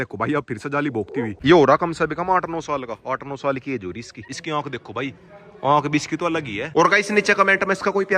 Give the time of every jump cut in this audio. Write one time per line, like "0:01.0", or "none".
0:01.4
0:04.2
0:06.6